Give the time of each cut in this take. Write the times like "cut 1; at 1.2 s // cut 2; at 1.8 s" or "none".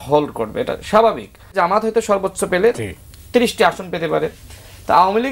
cut 1; at 1.6 s